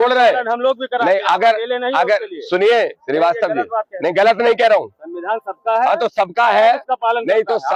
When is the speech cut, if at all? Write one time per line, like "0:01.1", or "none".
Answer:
none